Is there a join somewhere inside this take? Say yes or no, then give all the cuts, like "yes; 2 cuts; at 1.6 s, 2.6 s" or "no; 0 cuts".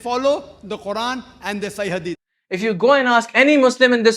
yes; 1 cut; at 2.2 s